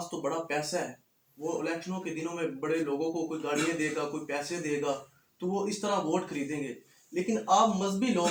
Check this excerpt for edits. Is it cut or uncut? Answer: uncut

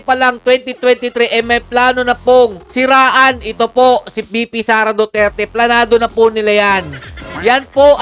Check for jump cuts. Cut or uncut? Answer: uncut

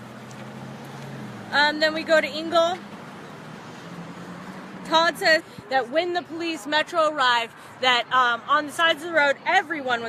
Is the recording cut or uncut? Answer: uncut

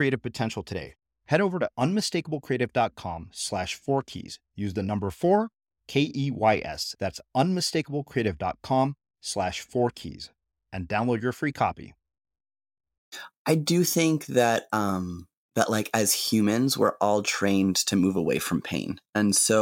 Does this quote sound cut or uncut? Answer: cut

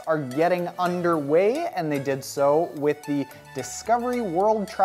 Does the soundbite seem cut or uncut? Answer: cut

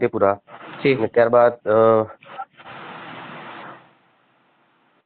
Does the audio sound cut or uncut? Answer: uncut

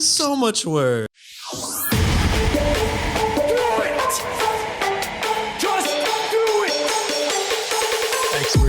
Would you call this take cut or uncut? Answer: cut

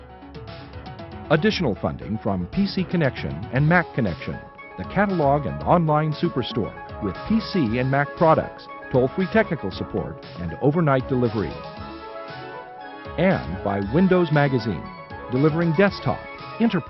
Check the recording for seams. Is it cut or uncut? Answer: cut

